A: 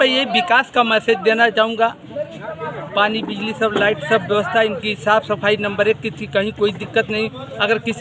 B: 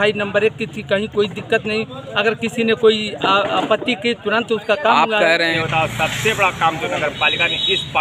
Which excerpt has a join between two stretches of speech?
B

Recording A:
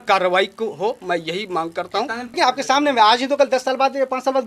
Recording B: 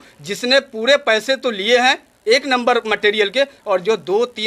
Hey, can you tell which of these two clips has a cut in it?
A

